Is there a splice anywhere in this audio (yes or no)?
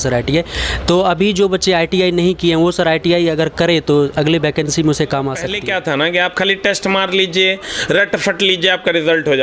yes